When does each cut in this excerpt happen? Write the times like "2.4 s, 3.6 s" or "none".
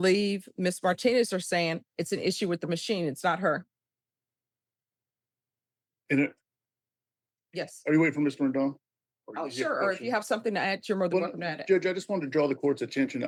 none